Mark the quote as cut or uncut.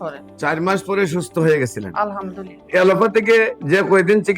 cut